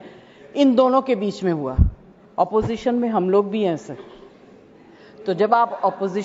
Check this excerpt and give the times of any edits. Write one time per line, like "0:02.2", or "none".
none